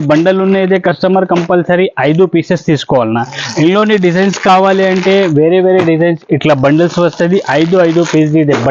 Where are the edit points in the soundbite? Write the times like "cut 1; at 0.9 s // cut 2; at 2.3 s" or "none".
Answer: none